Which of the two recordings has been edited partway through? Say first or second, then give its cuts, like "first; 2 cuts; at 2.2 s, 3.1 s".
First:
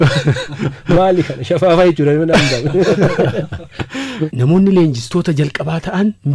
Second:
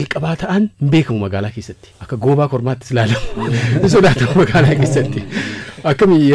first; 1 cut; at 4.3 s